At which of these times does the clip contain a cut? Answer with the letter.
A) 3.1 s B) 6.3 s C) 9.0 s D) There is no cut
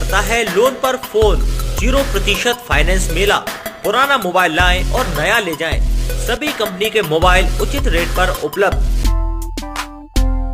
C